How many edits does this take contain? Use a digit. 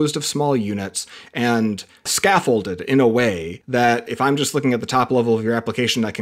2